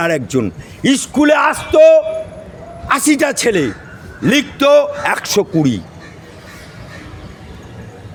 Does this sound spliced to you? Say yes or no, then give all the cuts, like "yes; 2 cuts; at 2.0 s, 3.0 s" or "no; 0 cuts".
no; 0 cuts